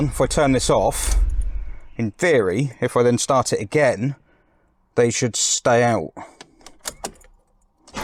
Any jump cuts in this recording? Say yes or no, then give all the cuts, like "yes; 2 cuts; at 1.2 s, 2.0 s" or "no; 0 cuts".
no; 0 cuts